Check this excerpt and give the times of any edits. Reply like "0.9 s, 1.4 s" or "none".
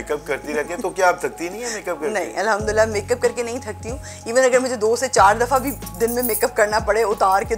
none